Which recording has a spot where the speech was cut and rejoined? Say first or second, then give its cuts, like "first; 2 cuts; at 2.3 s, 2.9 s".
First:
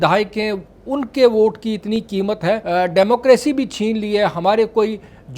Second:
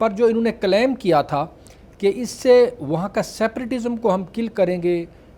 first; 1 cut; at 2.6 s